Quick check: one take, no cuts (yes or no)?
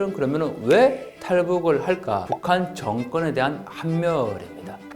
no